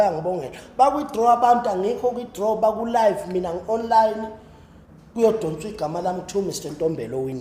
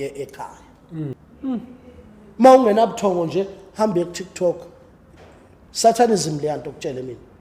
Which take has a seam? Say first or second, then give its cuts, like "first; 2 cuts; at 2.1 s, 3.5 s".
second; 1 cut; at 1.1 s